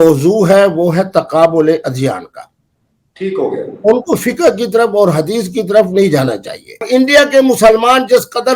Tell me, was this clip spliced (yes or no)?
yes